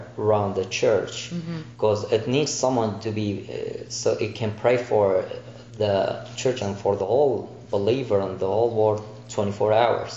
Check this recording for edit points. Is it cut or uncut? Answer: cut